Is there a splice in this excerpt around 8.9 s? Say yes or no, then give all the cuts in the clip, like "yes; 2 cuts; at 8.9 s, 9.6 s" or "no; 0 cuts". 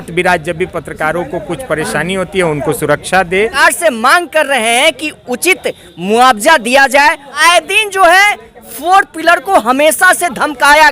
no; 2 cuts; at 3.5 s, 7.3 s